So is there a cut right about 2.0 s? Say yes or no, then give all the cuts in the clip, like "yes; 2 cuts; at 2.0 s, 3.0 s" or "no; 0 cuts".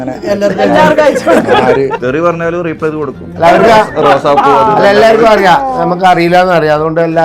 yes; 1 cut; at 2.0 s